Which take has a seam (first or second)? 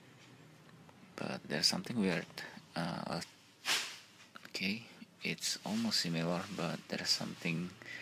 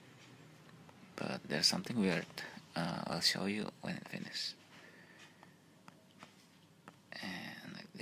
second